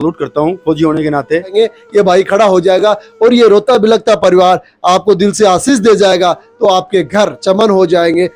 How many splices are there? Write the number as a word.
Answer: one